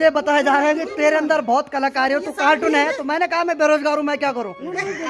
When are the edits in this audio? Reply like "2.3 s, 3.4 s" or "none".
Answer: none